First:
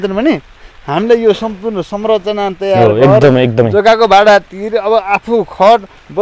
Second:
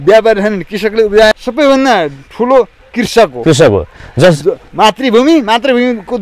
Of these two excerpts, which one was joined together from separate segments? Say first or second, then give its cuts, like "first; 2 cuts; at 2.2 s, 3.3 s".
second; 1 cut; at 1.3 s